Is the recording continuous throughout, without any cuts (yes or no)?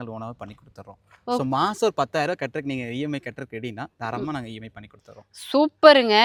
yes